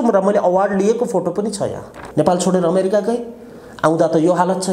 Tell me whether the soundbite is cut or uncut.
cut